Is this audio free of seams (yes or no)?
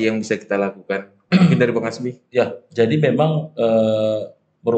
yes